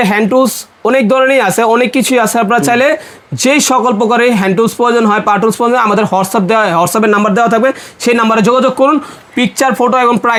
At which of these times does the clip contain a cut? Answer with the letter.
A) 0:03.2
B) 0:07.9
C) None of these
C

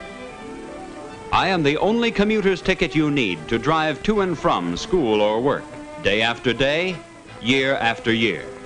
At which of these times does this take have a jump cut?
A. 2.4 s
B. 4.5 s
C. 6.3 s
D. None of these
A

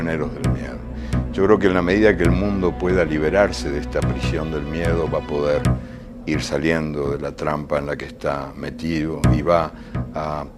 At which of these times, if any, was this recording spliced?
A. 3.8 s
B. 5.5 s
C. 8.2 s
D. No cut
D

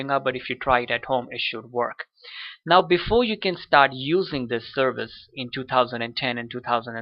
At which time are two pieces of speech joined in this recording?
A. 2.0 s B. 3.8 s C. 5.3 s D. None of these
C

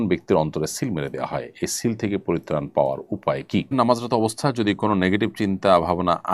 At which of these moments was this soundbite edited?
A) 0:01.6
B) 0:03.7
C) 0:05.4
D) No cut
B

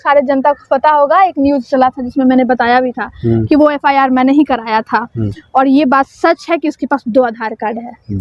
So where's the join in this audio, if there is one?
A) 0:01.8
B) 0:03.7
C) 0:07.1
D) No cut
D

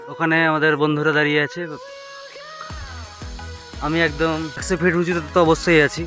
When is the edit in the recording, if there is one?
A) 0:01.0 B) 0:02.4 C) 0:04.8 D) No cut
C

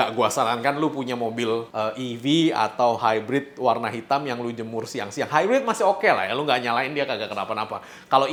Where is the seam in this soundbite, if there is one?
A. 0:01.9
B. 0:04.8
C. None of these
C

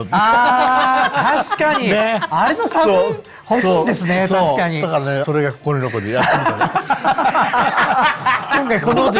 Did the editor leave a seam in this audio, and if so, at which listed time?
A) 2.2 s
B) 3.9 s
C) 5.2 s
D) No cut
C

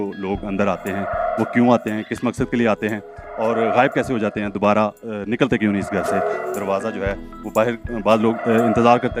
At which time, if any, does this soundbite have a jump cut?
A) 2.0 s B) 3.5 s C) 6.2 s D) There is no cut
D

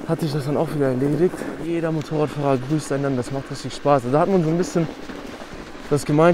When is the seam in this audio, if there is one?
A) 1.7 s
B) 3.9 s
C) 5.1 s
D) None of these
A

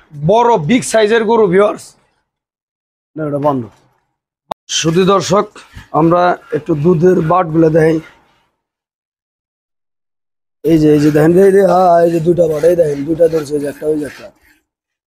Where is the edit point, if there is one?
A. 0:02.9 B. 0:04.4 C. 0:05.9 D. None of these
B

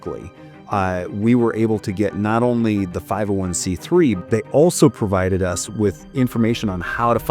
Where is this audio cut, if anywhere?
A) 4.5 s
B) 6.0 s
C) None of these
B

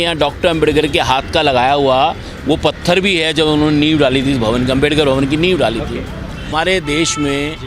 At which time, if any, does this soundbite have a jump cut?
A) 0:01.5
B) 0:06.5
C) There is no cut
B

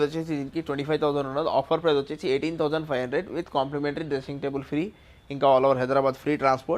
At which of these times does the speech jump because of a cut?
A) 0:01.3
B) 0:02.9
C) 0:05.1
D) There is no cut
D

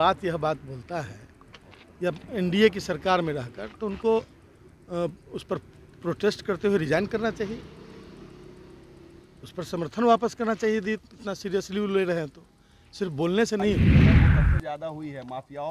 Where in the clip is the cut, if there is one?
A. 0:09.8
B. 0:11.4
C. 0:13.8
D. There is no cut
C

